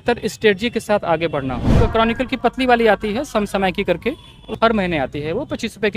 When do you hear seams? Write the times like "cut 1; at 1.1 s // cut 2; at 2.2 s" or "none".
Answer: cut 1; at 1.8 s // cut 2; at 4.3 s